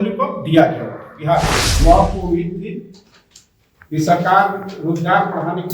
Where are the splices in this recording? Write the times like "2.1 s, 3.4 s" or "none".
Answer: 1.6 s